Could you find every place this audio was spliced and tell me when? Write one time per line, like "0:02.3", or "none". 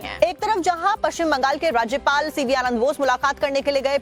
none